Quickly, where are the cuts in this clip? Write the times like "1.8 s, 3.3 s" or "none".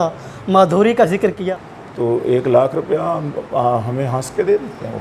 1.4 s